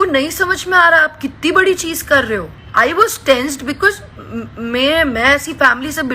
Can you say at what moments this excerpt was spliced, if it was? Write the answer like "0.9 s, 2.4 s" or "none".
2.6 s